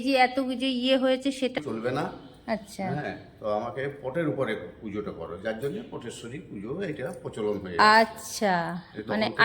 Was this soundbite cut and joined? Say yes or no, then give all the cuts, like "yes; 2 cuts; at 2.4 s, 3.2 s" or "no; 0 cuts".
yes; 1 cut; at 1.6 s